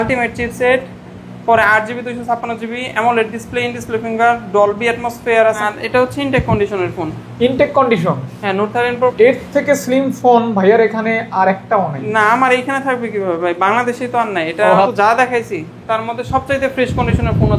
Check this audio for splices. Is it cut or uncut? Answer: cut